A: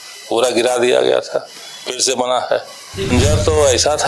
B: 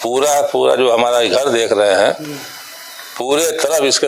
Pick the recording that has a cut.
A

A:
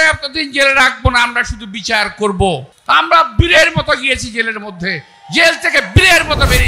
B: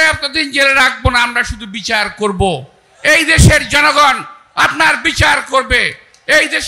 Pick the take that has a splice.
A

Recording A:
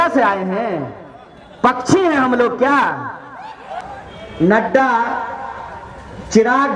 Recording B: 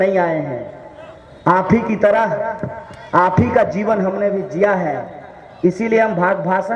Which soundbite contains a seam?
A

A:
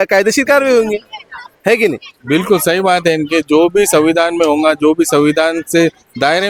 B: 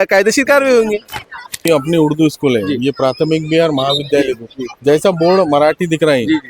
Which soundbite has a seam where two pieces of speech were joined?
B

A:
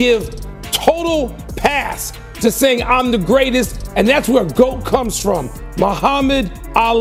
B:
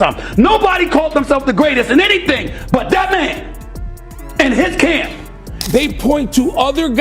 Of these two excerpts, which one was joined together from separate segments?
B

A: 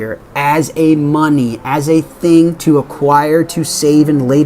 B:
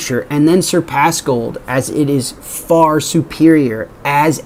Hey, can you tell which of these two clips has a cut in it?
A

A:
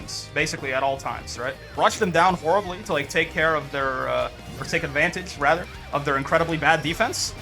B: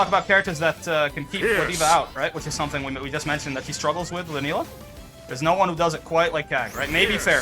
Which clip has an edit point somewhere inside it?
A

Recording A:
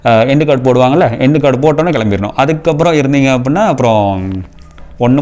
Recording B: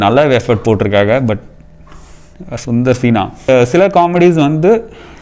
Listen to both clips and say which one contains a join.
B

